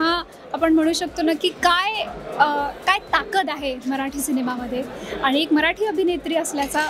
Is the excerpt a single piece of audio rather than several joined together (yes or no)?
yes